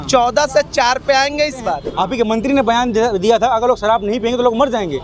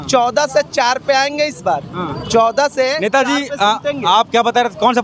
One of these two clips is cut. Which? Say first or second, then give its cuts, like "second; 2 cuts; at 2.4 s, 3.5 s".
first; 1 cut; at 1.9 s